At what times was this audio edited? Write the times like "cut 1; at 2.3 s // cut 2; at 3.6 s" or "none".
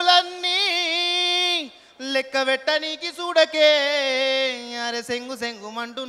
none